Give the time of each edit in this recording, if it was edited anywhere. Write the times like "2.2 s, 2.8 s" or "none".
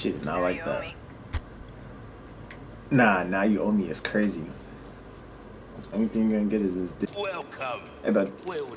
7.1 s